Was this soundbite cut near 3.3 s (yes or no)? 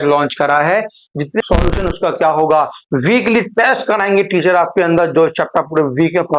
no